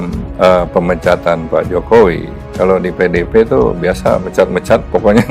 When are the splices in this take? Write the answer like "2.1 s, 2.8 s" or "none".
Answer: none